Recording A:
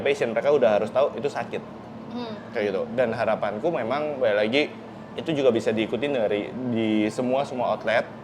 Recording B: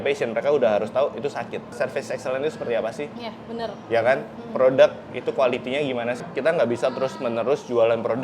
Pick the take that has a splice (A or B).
B